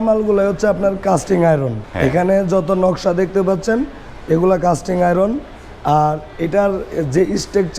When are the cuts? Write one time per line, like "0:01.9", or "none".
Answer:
0:01.8